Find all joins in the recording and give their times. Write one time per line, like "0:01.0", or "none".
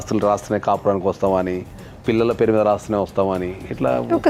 none